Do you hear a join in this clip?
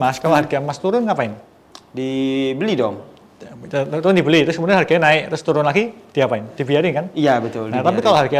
no; 0 cuts

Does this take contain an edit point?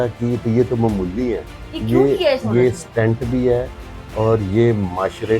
yes; 1 cut; at 1.6 s

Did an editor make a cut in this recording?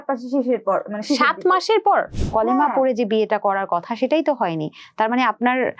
yes; 1 cut; at 2.1 s

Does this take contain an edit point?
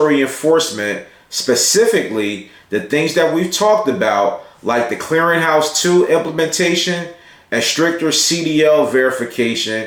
no; 0 cuts

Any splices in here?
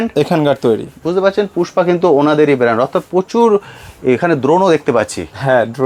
no; 0 cuts

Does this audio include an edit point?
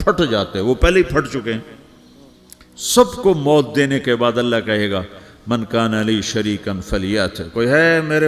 no; 0 cuts

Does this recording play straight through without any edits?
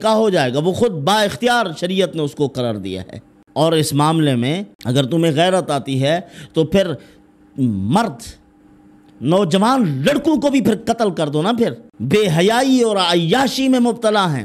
no; 2 cuts; at 4.7 s, 11.9 s

